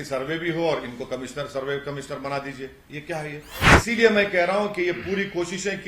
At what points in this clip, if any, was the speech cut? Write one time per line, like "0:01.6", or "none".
0:03.7